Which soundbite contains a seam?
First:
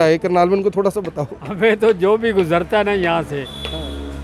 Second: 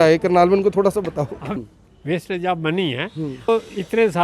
second; 2 cuts; at 1.4 s, 3.5 s

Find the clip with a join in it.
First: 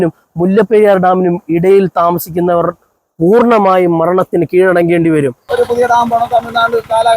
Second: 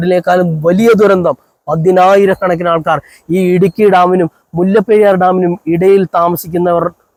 first; 1 cut; at 5.4 s

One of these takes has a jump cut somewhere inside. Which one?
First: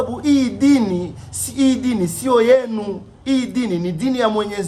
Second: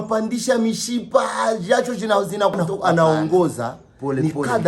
second; 1 cut; at 2.7 s

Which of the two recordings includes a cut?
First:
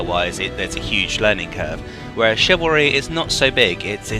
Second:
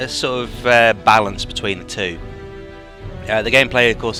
first; 1 cut; at 3.2 s

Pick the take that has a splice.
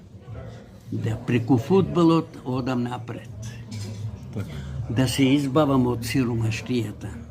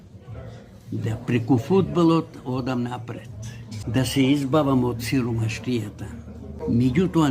second; 2 cuts; at 3.7 s, 6.4 s

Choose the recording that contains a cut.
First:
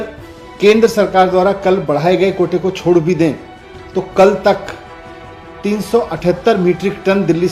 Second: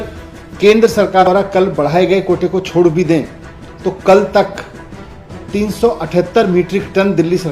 second; 1 cut; at 1.3 s

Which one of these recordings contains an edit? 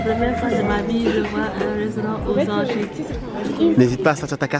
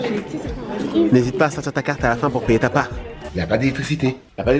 second; 1 cut; at 3.3 s

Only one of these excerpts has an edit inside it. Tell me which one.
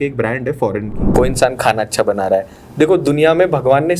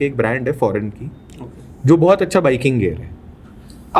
first; 1 cut; at 1.0 s

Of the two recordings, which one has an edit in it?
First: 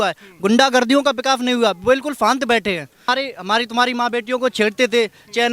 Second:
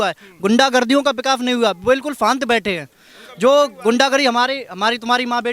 first; 1 cut; at 3.1 s

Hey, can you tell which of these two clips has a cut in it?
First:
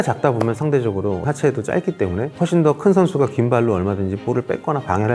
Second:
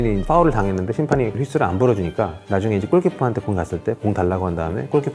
first; 2 cuts; at 1.2 s, 2.3 s

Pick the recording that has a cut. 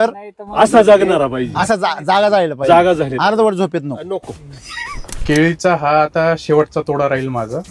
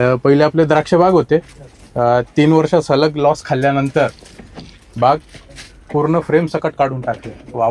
first; 1 cut; at 5.1 s

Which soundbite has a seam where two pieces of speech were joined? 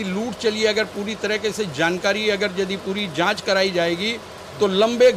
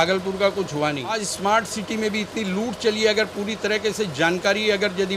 second; 1 cut; at 1.2 s

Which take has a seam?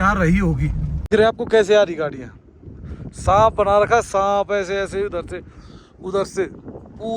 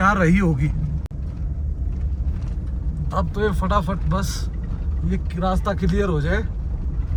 first; 1 cut; at 1.1 s

